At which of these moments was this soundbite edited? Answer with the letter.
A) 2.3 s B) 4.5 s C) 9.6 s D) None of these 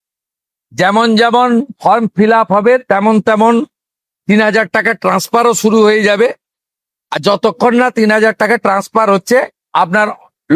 C